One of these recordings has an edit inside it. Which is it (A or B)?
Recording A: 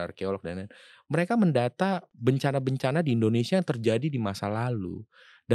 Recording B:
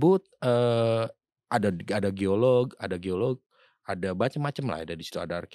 A